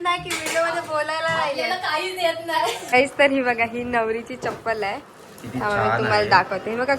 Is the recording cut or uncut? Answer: cut